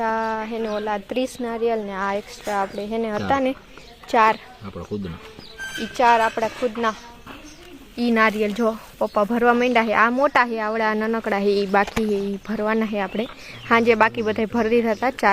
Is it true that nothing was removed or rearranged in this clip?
yes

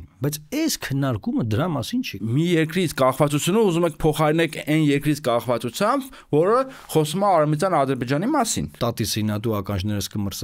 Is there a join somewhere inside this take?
yes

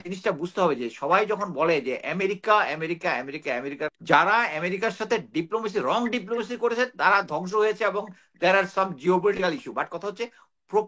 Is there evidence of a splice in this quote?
yes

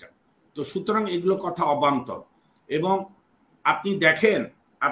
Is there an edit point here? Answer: no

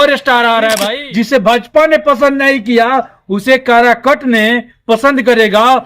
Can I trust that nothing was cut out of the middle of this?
no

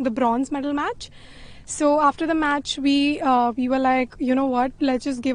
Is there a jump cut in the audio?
no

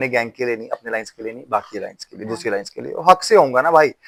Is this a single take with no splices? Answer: yes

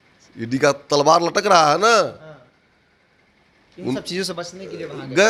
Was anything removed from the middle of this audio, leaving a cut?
no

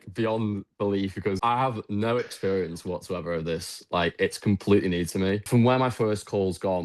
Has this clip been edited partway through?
yes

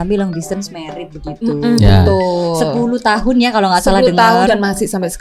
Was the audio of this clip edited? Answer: no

